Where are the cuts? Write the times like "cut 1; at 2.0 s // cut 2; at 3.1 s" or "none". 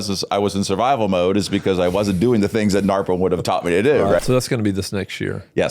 cut 1; at 4.2 s